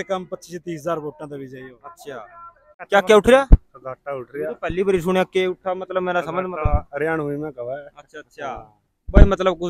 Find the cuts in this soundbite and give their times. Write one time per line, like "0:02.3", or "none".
0:02.9

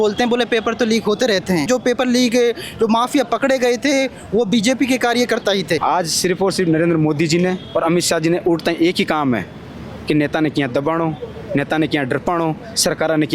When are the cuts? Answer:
0:01.6
0:05.8

